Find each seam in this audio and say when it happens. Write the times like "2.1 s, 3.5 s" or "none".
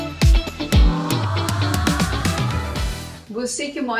2.9 s